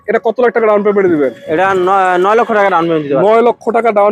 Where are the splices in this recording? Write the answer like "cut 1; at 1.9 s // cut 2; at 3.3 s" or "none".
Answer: none

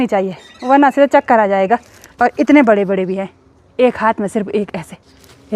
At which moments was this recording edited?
cut 1; at 2.0 s

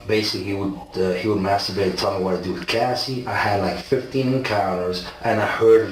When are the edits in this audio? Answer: none

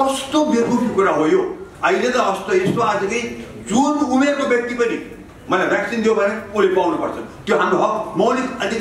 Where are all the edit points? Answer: cut 1; at 1.7 s

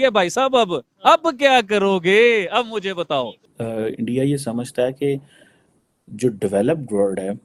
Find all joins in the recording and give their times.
none

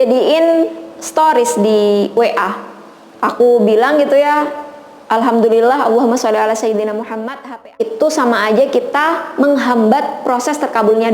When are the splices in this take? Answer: cut 1; at 7.8 s

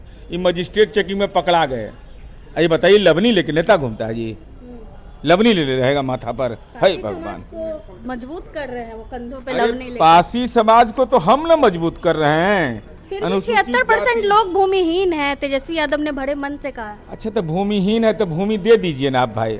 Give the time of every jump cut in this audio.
none

